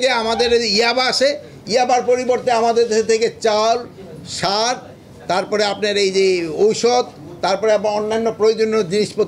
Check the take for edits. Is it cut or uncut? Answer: uncut